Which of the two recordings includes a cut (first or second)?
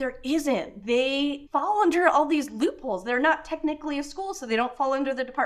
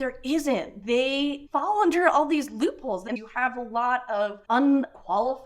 second